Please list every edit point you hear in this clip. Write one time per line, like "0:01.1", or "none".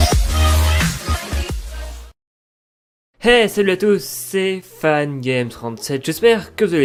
none